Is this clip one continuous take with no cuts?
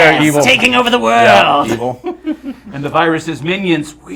yes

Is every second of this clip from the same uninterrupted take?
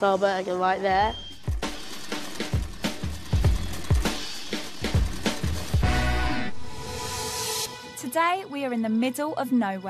no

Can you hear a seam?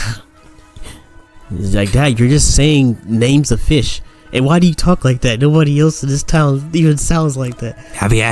no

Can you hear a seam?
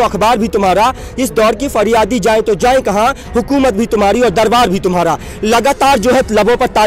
no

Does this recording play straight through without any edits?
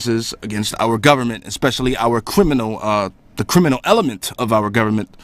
no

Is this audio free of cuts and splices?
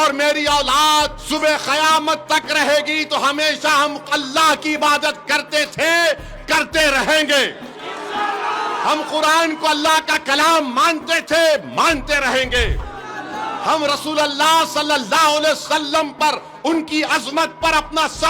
no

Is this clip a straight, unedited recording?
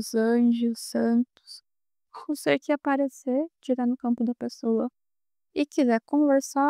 yes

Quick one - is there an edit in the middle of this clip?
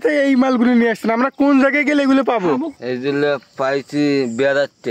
no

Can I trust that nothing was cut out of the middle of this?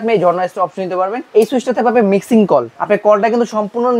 no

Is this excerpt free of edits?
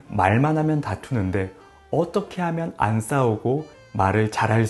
yes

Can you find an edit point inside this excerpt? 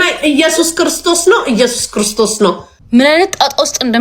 yes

